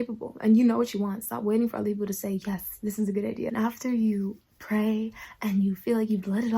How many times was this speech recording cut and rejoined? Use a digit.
1